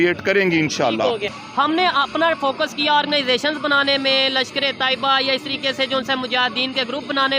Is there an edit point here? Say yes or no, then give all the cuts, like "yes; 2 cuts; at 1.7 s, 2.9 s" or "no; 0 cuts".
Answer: yes; 1 cut; at 1.4 s